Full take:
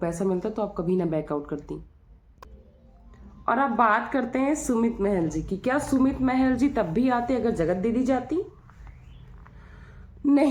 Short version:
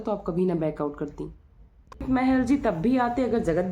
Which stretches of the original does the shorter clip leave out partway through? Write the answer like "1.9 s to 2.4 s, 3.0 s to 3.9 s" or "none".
2.6 s to 6.2 s